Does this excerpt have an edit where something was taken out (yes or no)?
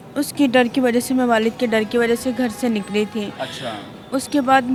no